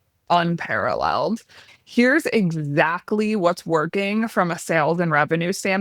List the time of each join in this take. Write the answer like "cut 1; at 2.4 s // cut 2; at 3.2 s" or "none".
cut 1; at 1.7 s